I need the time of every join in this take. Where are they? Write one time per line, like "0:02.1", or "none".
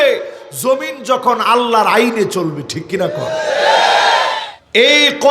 0:04.4